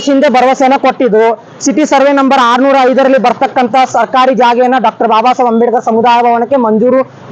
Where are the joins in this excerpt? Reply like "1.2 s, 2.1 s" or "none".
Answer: none